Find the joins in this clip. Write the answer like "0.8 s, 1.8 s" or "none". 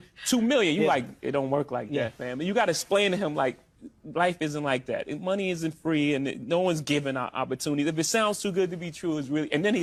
none

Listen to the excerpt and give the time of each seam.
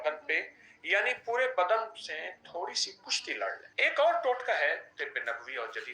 3.7 s, 4.9 s

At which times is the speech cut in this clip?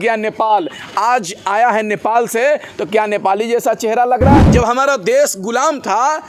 4.4 s

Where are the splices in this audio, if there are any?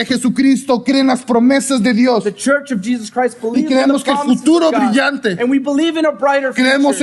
none

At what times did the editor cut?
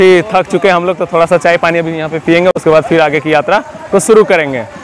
none

